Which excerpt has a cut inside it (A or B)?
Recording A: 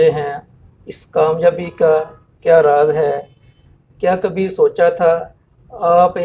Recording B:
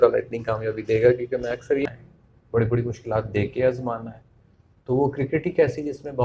B